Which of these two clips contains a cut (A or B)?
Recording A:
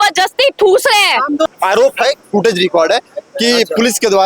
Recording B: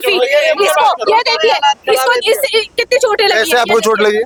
A